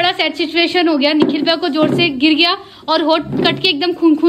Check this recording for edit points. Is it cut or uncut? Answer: uncut